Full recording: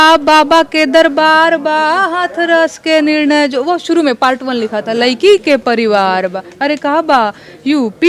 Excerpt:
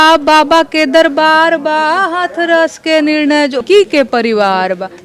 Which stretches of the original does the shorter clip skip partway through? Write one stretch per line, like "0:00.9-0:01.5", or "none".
0:03.6-0:05.2